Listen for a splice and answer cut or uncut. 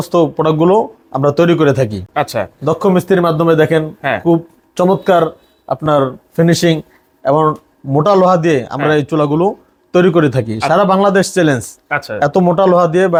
uncut